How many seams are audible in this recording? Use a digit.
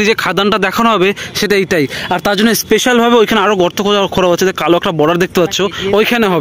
0